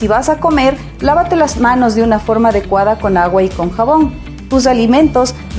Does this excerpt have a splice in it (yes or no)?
no